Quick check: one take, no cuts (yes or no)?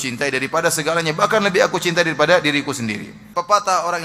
no